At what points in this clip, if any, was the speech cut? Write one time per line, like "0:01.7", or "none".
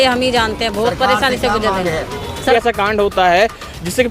0:02.5